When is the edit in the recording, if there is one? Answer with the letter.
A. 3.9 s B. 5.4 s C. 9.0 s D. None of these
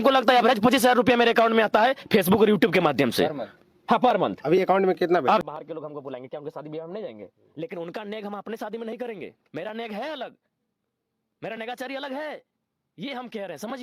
B